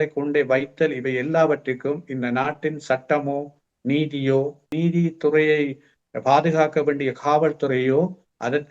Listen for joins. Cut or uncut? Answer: cut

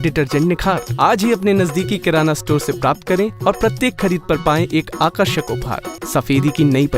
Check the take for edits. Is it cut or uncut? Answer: cut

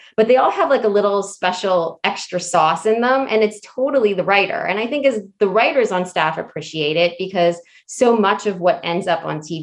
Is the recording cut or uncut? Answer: uncut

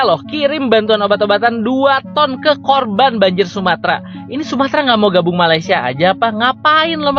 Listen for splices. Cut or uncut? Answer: uncut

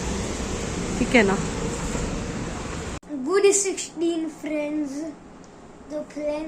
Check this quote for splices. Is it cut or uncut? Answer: uncut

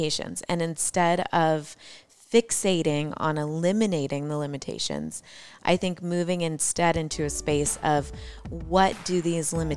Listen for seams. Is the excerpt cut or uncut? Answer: uncut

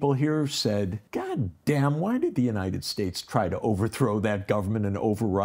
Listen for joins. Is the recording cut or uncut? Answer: cut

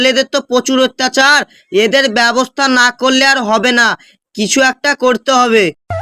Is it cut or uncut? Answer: uncut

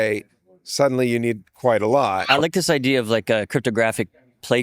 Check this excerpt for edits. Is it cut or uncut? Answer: cut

